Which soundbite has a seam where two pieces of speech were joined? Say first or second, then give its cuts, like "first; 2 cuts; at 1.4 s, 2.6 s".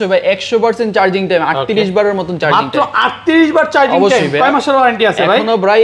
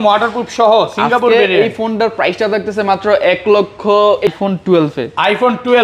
second; 1 cut; at 4.3 s